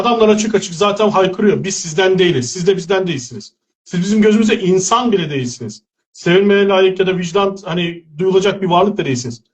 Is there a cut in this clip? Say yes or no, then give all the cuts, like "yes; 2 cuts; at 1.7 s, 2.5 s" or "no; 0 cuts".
no; 0 cuts